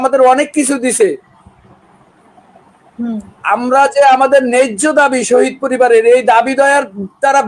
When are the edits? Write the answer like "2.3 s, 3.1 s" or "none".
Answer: none